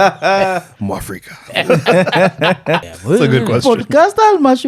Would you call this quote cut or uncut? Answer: cut